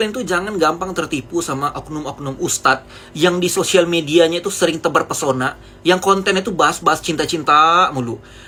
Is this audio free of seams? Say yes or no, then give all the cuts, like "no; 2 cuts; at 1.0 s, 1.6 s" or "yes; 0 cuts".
yes; 0 cuts